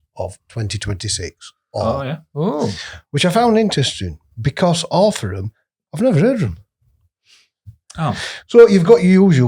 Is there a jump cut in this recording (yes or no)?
no